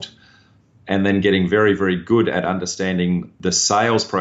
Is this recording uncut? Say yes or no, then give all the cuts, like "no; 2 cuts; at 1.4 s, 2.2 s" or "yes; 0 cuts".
no; 1 cut; at 3.3 s